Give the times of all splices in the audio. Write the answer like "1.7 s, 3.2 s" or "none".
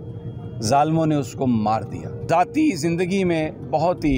2.1 s